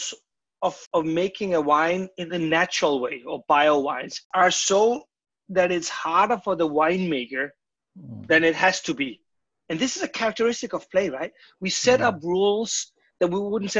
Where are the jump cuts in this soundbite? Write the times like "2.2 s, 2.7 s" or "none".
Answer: 0.9 s, 4.2 s